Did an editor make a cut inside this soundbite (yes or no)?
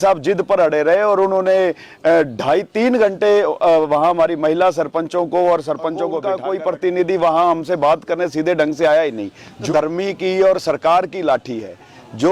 yes